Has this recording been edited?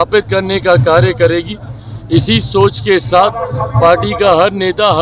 no; 0 cuts

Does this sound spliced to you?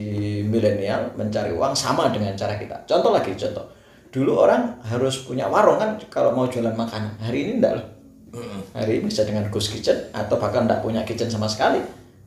no; 0 cuts

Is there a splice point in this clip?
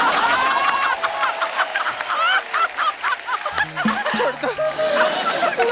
yes; 1 cut; at 4.0 s

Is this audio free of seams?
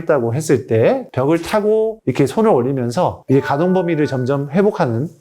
no; 2 cuts; at 1.1 s, 3.2 s

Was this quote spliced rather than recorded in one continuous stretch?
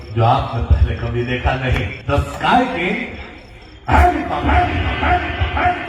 yes; 1 cut; at 1.9 s

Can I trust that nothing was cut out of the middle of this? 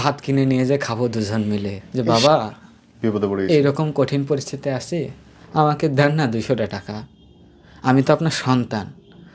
no; 1 cut; at 1.8 s

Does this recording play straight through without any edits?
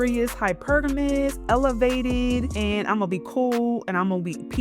no; 1 cut; at 2.5 s

